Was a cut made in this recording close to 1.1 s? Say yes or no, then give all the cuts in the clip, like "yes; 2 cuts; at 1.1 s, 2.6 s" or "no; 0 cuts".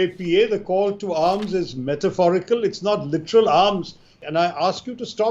no; 1 cut; at 4.1 s